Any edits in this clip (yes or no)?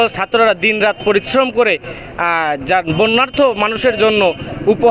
no